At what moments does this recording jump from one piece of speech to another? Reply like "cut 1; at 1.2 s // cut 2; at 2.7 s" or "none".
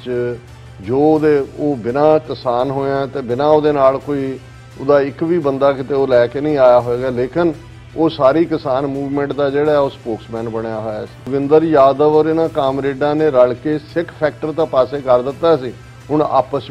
cut 1; at 11.3 s